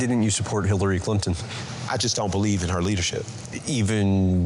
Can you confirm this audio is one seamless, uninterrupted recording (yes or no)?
yes